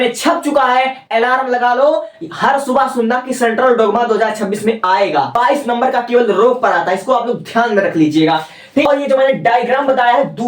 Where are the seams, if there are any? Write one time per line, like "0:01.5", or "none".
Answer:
0:05.3
0:08.9